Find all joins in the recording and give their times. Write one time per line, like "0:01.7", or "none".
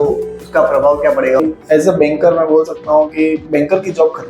0:01.4